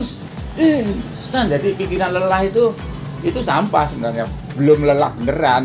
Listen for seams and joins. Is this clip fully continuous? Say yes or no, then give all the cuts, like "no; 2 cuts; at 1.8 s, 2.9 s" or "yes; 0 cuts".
yes; 0 cuts